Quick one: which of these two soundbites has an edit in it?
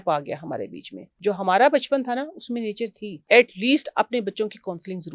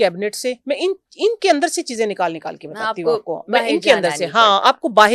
first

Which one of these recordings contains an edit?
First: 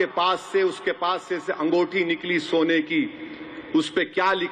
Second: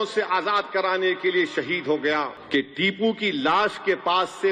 second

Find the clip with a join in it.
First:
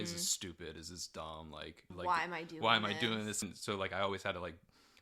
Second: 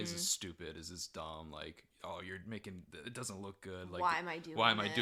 first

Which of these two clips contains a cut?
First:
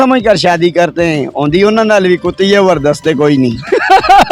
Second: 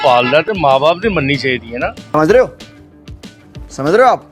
second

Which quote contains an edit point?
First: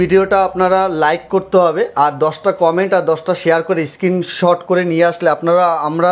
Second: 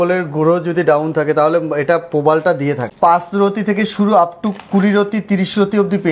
second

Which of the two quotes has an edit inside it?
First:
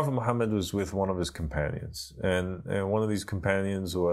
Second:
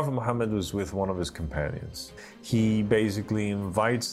second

